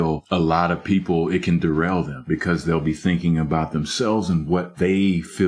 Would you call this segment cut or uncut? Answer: cut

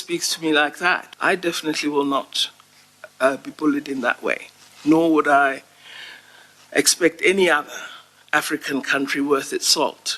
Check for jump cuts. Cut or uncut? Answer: cut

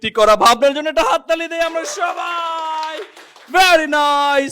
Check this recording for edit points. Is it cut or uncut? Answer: uncut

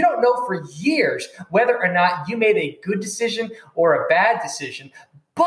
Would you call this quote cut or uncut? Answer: uncut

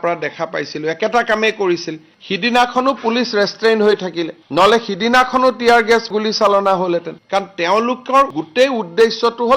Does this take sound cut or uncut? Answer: uncut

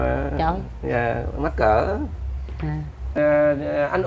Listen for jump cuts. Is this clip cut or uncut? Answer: cut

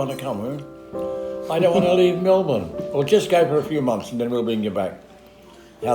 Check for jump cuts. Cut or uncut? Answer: uncut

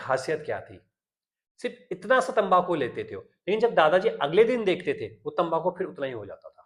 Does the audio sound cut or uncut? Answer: uncut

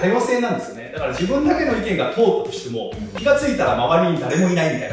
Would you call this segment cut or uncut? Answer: uncut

